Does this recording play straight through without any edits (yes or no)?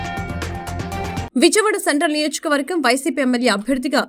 no